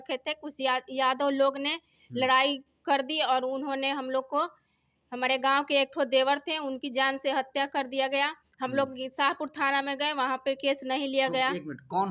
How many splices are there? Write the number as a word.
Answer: zero